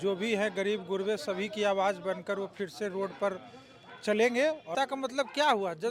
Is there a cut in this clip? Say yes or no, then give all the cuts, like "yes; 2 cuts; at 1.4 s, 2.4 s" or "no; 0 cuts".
yes; 1 cut; at 4.7 s